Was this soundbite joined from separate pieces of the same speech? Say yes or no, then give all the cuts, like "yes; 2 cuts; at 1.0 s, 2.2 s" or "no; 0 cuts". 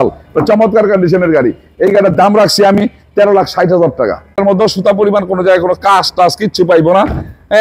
yes; 1 cut; at 4.4 s